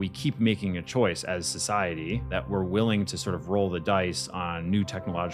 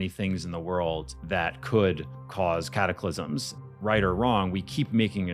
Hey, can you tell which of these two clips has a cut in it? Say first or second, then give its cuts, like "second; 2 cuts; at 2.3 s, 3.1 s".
second; 2 cuts; at 1.1 s, 3.6 s